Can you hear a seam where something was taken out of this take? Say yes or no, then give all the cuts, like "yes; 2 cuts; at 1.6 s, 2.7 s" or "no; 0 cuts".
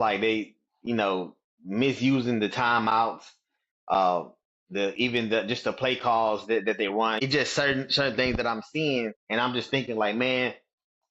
yes; 2 cuts; at 7.2 s, 9.2 s